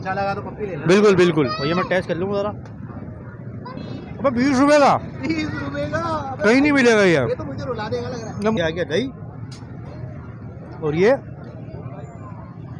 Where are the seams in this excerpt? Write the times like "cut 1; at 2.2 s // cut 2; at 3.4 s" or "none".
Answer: cut 1; at 3.8 s // cut 2; at 8.6 s

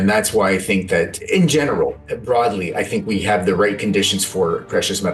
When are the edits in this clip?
cut 1; at 1.2 s

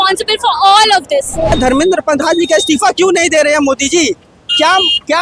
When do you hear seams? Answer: cut 1; at 1.5 s

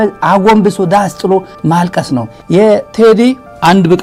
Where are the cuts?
none

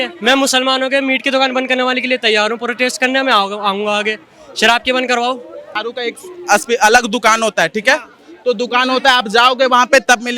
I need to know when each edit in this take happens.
cut 1; at 5.8 s

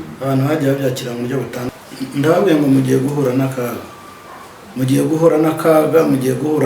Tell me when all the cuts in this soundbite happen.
cut 1; at 1.7 s

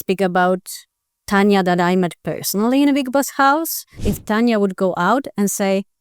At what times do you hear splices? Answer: cut 1; at 4.1 s

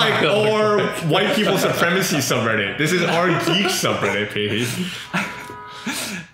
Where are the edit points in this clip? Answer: none

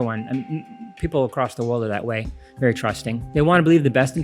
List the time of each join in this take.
cut 1; at 3.2 s

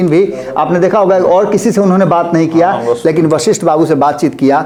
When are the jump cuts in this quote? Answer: none

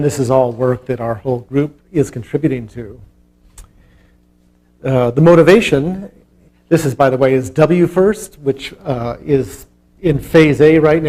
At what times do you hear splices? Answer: none

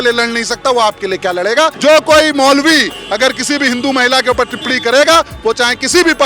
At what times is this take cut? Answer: cut 1; at 1.8 s

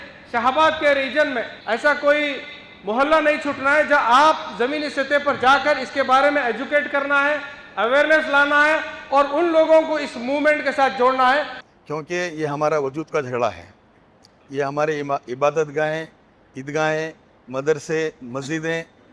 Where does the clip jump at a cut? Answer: cut 1; at 1.5 s // cut 2; at 11.6 s

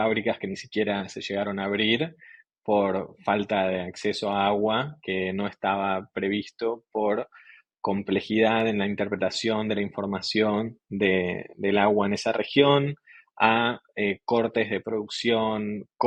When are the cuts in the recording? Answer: none

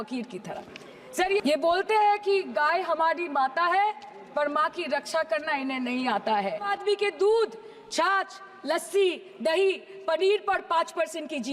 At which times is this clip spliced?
cut 1; at 1.4 s // cut 2; at 6.8 s

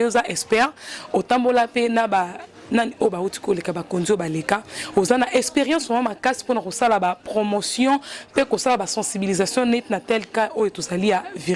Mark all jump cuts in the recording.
none

